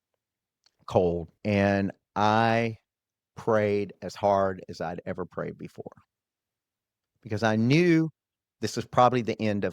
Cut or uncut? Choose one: cut